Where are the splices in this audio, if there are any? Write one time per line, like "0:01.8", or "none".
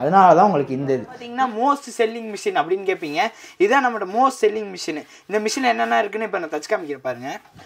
0:01.3